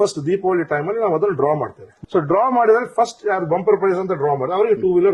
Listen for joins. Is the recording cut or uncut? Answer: cut